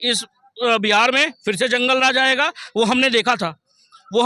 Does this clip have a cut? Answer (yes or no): no